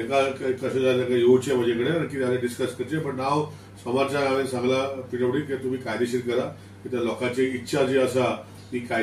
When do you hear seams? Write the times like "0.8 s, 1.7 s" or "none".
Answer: none